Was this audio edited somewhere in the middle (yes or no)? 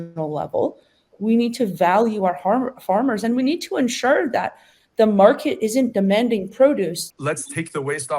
yes